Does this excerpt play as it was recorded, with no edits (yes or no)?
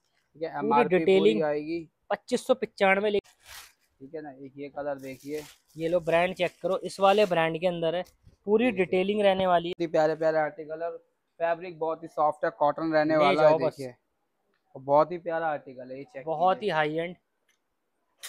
no